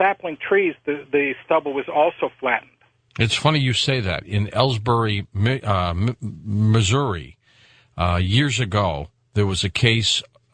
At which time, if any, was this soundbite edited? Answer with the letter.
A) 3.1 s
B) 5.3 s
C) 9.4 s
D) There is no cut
B